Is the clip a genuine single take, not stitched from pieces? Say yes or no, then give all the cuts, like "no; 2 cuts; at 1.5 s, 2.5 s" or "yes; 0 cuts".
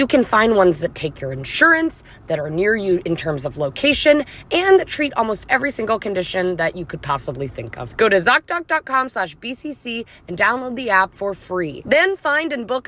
no; 1 cut; at 7.9 s